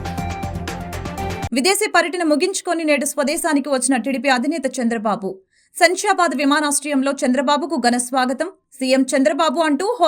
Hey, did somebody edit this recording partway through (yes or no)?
yes